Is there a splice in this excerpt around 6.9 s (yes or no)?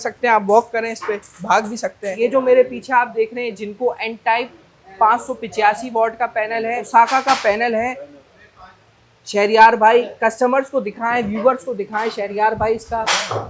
yes